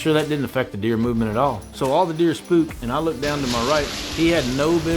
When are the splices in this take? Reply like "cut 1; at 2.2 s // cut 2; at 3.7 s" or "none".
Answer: cut 1; at 1.7 s // cut 2; at 4.0 s